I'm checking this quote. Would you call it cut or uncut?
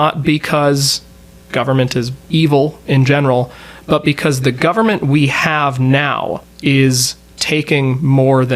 cut